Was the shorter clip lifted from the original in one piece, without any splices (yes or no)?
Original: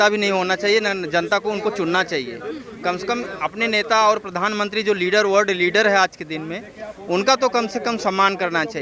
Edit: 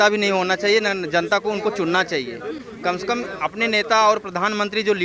yes